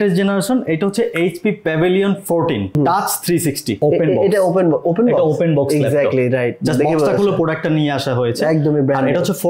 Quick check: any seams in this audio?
yes; 2 cuts; at 2.8 s, 3.8 s

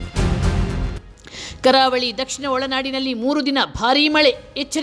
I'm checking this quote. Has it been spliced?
yes; 1 cut; at 1.2 s

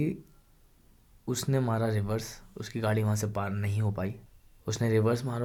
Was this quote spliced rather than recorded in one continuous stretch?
no; 0 cuts

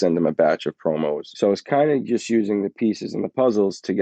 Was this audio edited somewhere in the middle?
yes; 1 cut; at 1.3 s

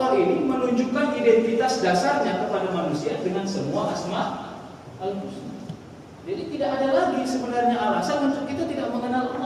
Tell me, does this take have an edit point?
no; 0 cuts

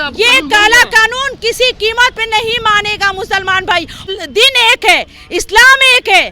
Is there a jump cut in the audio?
yes; 1 cut; at 4.0 s

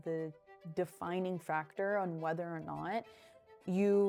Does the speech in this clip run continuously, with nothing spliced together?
yes; 0 cuts

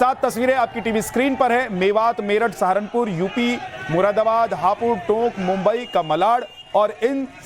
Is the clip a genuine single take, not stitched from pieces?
no; 1 cut; at 5.0 s

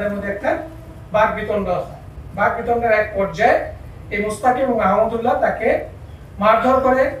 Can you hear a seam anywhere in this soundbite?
no; 0 cuts

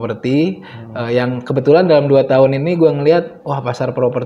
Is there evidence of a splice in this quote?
no; 0 cuts

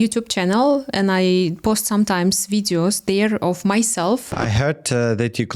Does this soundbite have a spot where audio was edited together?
yes; 1 cut; at 4.3 s

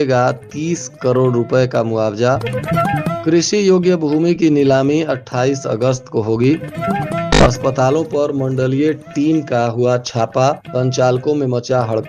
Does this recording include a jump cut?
no; 0 cuts

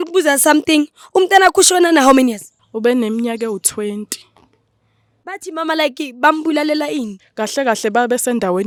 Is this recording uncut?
yes; 0 cuts

